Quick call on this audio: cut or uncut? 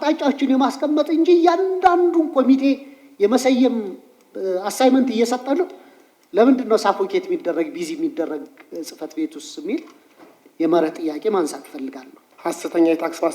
uncut